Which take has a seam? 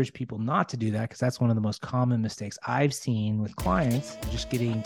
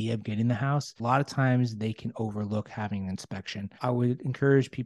second; 2 cuts; at 1.0 s, 3.6 s

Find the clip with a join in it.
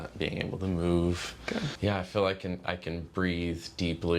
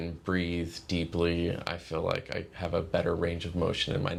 first; 1 cut; at 1.7 s

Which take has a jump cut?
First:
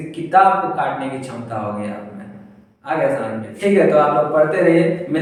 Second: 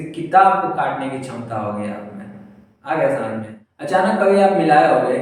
second; 1 cut; at 3.5 s

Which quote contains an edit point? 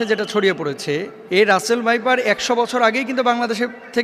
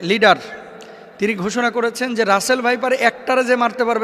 first; 1 cut; at 1.1 s

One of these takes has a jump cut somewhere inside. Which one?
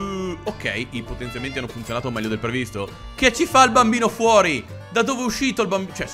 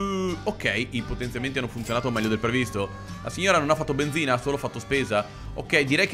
first; 1 cut; at 3.0 s

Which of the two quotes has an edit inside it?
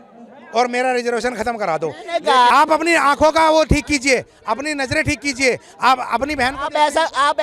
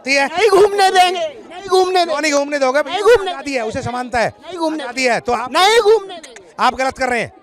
first; 1 cut; at 2.5 s

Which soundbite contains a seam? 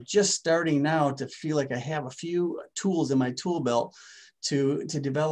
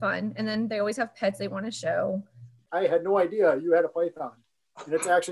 second; 1 cut; at 2.6 s

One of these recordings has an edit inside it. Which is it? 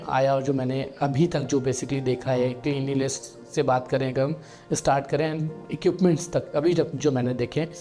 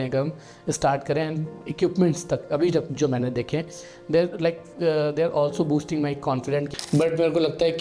second; 1 cut; at 6.7 s

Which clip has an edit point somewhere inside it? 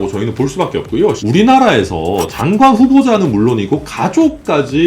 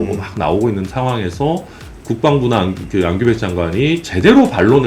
first; 1 cut; at 1.2 s

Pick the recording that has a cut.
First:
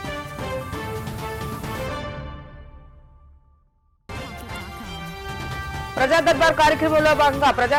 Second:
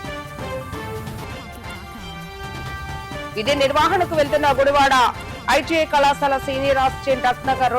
second; 1 cut; at 0.9 s

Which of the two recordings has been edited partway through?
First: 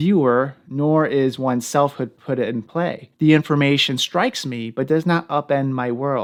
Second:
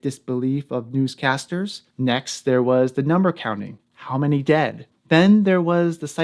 second; 2 cuts; at 1.8 s, 4.9 s

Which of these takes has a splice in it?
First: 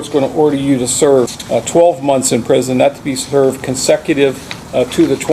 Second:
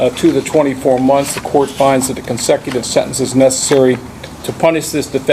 first; 1 cut; at 1.4 s

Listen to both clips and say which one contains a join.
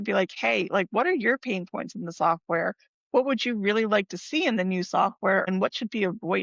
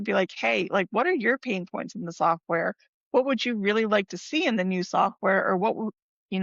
first; 1 cut; at 5.5 s

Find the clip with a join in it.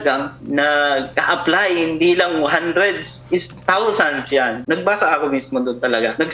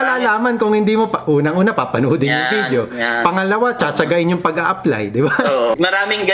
first; 1 cut; at 4.6 s

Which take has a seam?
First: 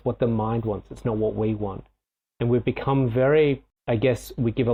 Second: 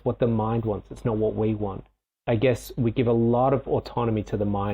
second; 1 cut; at 2.1 s

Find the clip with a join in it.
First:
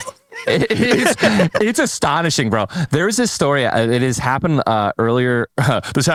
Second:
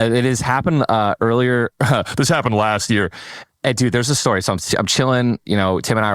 second; 1 cut; at 3.4 s

